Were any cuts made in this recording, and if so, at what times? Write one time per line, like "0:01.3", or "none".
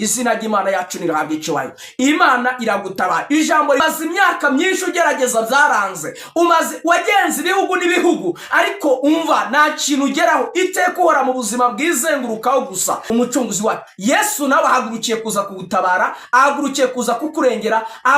0:03.8
0:13.0